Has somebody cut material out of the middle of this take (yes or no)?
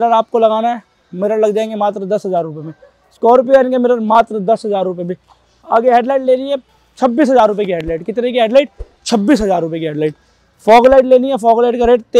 no